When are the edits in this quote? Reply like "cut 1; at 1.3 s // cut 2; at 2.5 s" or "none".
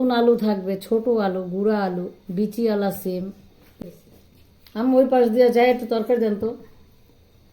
cut 1; at 3.6 s